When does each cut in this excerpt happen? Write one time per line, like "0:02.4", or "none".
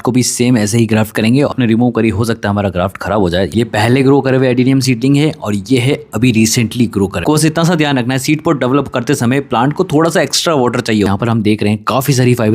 0:01.5
0:03.5
0:07.2
0:11.1